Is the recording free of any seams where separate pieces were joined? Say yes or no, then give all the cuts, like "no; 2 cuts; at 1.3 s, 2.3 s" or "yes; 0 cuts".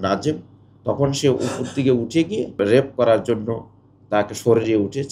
no; 1 cut; at 2.9 s